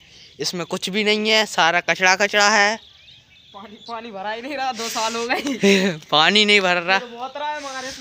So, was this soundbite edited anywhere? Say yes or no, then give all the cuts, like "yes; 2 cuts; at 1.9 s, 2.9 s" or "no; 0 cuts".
no; 0 cuts